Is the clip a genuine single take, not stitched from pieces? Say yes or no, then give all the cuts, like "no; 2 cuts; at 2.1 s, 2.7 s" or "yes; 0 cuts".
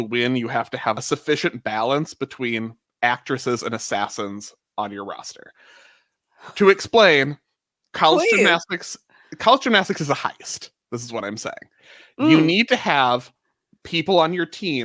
no; 1 cut; at 1.0 s